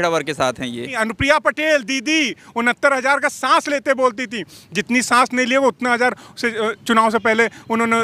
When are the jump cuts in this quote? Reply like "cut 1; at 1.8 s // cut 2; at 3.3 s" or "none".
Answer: cut 1; at 0.9 s

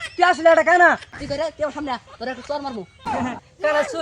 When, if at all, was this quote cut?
cut 1; at 1.2 s // cut 2; at 3.1 s

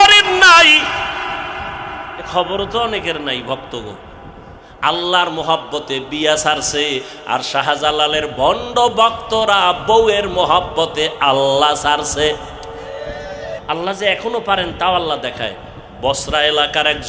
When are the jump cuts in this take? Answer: cut 1; at 13.6 s

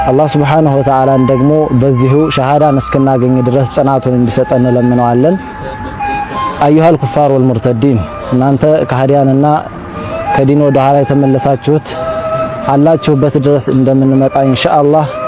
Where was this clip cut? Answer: none

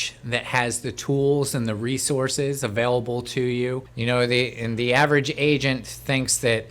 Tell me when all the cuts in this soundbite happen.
cut 1; at 3.9 s

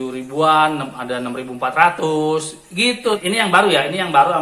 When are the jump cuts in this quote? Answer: cut 1; at 3.2 s

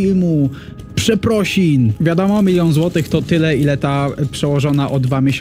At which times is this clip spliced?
cut 1; at 2.3 s

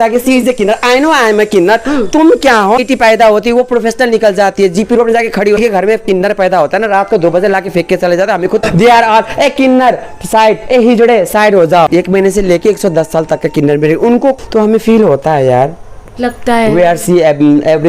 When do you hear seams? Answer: cut 1; at 2.8 s // cut 2; at 5.6 s // cut 3; at 8.6 s // cut 4; at 11.9 s // cut 5; at 14.4 s

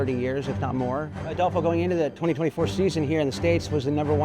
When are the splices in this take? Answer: cut 1; at 1.3 s

